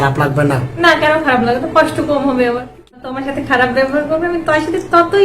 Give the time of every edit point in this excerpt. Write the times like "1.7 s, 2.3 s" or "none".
2.9 s